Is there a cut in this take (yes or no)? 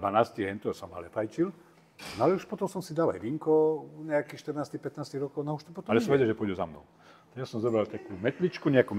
yes